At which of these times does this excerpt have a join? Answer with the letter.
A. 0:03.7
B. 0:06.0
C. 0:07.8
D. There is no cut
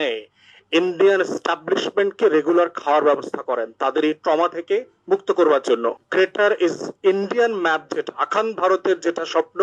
B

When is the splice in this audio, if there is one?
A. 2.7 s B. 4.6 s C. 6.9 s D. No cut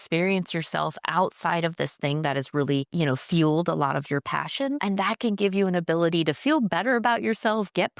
D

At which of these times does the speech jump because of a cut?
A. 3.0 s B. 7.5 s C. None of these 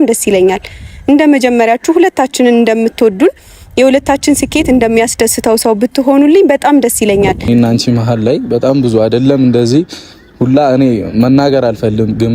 B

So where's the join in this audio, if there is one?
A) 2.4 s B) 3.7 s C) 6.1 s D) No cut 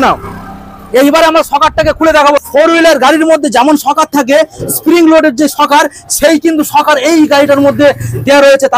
A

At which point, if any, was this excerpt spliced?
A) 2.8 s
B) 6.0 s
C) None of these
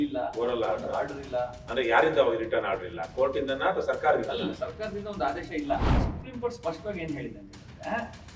B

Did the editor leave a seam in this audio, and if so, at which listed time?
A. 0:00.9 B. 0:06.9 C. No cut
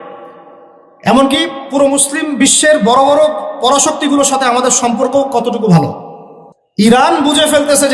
B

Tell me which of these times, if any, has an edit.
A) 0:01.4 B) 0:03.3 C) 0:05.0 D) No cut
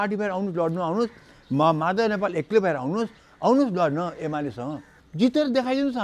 C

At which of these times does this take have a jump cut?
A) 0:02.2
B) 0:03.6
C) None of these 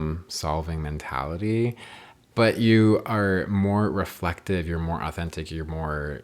A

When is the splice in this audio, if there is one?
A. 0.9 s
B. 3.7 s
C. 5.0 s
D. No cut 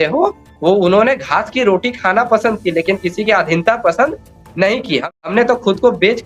C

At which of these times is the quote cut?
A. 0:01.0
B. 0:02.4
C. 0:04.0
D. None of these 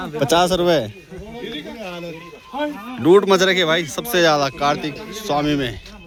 D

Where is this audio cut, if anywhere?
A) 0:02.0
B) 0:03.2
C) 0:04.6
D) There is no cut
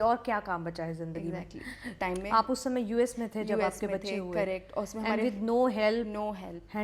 A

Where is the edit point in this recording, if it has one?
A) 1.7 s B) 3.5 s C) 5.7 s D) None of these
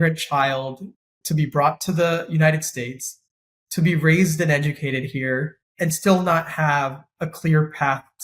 C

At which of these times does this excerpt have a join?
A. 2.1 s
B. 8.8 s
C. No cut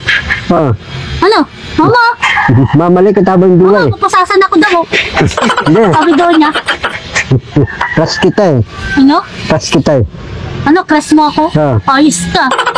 C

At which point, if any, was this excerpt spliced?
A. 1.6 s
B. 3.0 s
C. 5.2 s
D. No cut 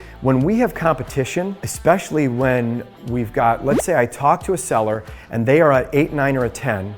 A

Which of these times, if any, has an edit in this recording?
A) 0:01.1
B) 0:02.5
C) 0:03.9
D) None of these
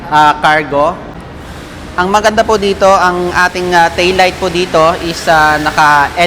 A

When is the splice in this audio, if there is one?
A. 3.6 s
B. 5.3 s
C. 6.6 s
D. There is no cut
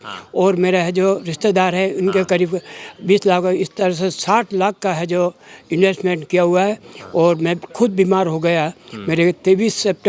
D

